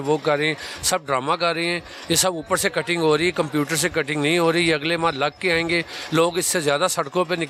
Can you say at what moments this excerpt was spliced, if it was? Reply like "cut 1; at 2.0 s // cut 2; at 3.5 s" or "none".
none

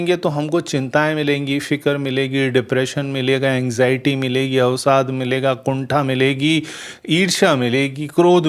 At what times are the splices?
none

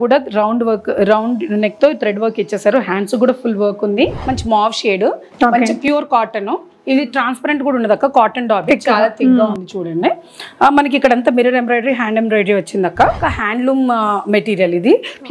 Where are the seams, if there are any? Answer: cut 1; at 4.2 s // cut 2; at 13.2 s

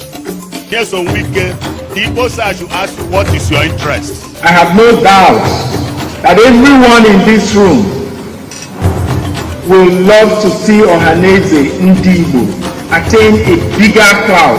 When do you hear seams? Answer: cut 1; at 1.2 s

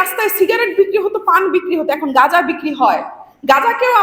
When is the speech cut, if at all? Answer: none

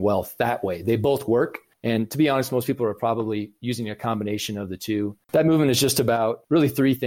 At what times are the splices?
cut 1; at 1.7 s // cut 2; at 5.2 s

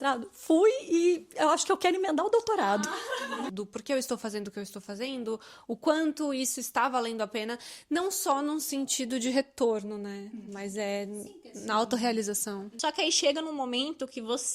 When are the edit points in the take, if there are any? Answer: cut 1; at 3.5 s // cut 2; at 12.7 s

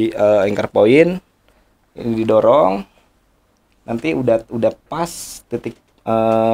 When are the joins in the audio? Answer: none

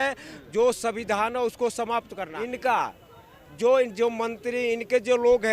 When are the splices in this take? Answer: cut 1; at 2.2 s

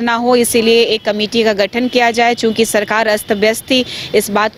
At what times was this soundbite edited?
none

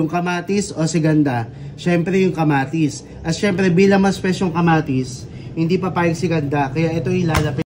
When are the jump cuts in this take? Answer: none

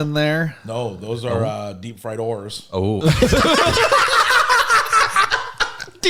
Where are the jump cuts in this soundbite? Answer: none

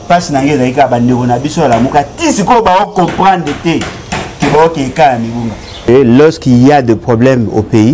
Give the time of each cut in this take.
cut 1; at 5.9 s

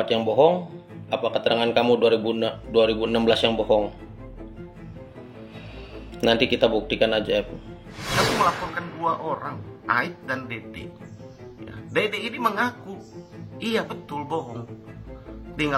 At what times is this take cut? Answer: cut 1; at 7.8 s

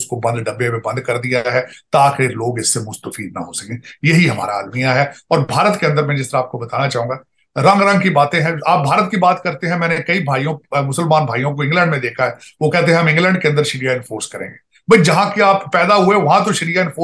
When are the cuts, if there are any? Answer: none

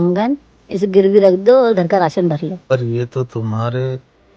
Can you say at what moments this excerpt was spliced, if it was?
cut 1; at 2.7 s

